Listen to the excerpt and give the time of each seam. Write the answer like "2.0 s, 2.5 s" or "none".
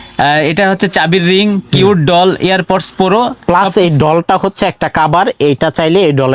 none